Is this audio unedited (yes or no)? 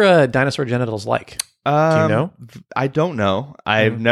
yes